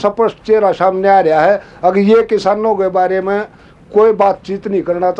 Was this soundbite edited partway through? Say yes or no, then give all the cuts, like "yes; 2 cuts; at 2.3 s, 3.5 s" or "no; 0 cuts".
no; 0 cuts